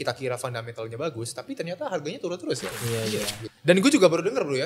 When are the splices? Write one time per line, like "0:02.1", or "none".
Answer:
0:03.4